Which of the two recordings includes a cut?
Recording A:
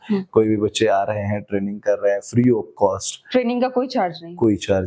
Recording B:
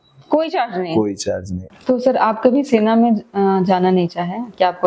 B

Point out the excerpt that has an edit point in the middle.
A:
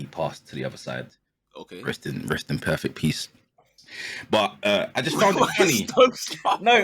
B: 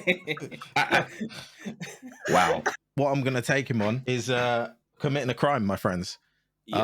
B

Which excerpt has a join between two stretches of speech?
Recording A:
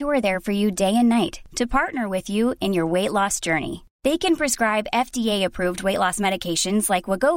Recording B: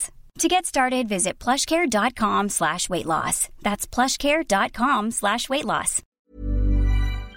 B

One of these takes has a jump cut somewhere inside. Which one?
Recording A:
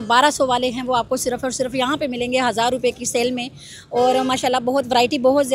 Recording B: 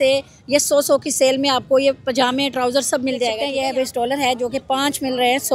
B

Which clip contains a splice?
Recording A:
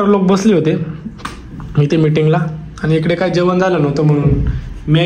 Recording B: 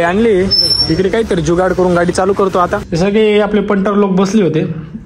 B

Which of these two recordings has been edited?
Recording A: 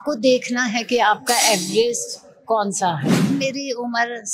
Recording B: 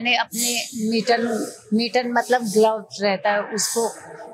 A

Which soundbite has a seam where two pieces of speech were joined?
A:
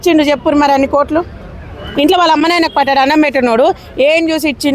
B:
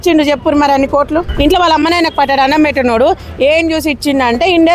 B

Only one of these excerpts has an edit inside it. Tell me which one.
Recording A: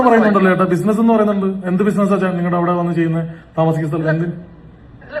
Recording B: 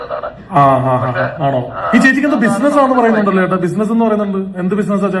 B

